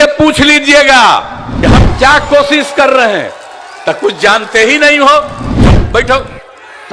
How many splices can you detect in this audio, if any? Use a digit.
2